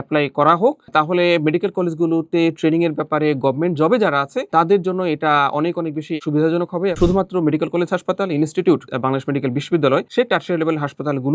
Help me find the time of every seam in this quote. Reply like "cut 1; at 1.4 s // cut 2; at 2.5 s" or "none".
cut 1; at 0.9 s // cut 2; at 6.2 s // cut 3; at 7.0 s // cut 4; at 10.1 s